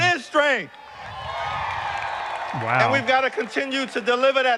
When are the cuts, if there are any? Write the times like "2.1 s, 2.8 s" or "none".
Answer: none